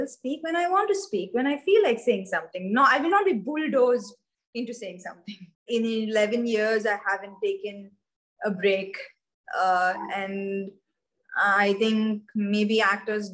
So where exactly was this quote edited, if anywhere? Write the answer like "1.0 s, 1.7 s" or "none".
5.6 s